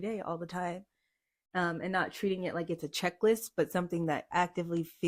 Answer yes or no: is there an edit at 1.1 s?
no